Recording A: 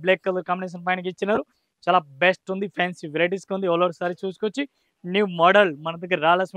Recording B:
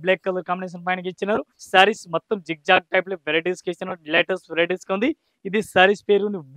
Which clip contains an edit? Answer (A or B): B